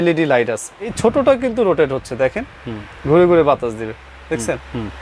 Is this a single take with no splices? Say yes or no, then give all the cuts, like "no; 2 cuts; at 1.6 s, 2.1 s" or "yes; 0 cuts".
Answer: no; 1 cut; at 0.9 s